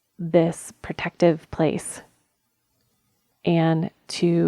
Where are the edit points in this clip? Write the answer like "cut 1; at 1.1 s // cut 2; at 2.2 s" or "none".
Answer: cut 1; at 3.3 s